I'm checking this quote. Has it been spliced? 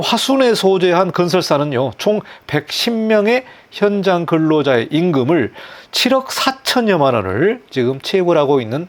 no; 0 cuts

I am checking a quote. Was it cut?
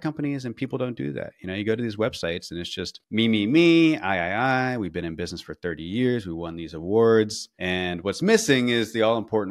no; 0 cuts

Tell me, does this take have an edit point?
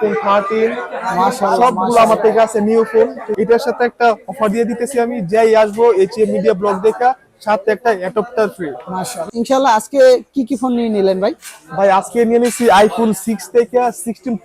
yes; 2 cuts; at 3.2 s, 9.3 s

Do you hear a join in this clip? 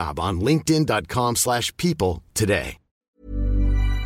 yes; 1 cut; at 3.1 s

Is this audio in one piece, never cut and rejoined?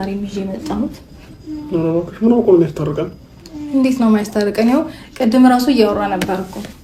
yes; 0 cuts

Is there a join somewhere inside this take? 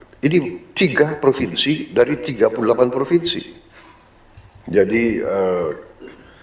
no; 0 cuts

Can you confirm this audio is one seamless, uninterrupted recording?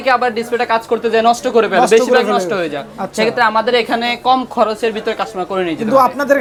yes; 0 cuts

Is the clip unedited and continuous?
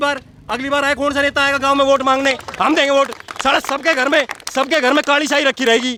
yes; 0 cuts

